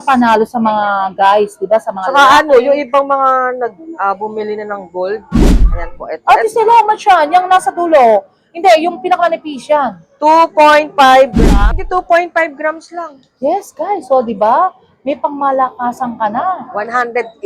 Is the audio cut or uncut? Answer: cut